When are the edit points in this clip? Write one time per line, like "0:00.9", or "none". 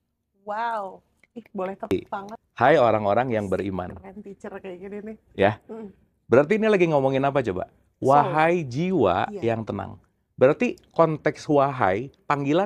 0:01.9

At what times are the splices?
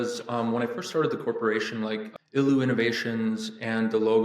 0:02.1

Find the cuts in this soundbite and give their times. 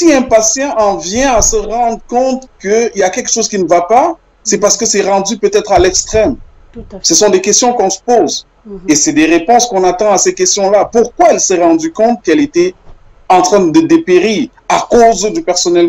none

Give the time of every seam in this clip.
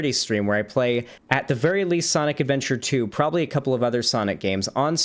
0:01.2

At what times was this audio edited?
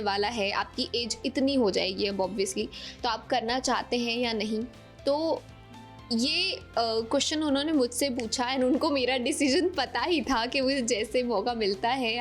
none

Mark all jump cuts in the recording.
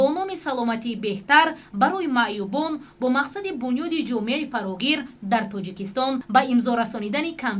0:06.2

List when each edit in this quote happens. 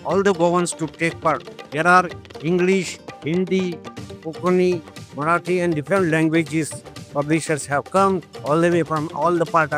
none

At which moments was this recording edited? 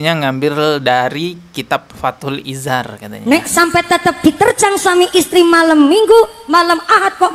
none

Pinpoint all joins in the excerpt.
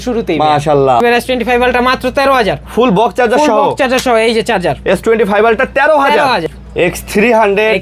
0:01.0
0:06.6

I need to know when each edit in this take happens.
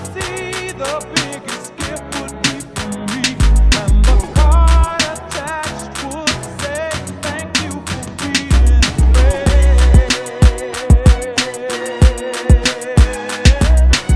none

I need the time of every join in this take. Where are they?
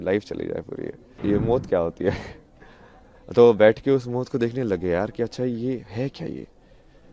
0:01.2

